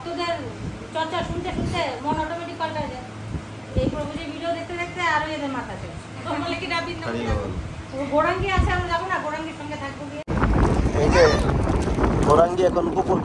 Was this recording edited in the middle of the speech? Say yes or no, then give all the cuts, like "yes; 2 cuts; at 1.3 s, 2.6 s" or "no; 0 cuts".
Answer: yes; 1 cut; at 10.2 s